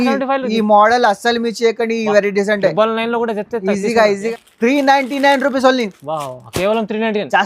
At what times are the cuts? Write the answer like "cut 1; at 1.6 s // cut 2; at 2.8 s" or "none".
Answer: cut 1; at 4.2 s